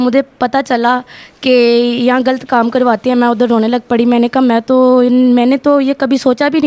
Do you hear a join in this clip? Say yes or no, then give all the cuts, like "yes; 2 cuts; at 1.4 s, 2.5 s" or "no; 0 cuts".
no; 0 cuts